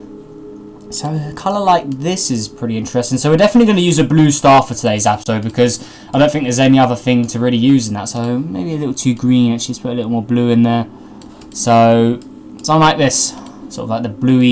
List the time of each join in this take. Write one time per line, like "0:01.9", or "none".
0:12.9